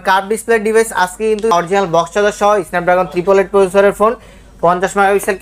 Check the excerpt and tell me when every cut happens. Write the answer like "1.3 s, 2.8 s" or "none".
1.5 s